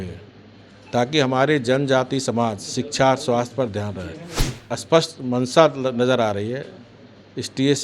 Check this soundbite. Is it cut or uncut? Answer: cut